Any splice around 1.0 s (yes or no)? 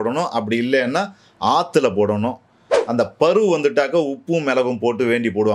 no